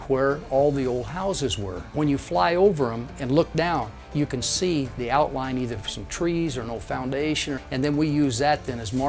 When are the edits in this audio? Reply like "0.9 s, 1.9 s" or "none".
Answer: 1.9 s, 7.6 s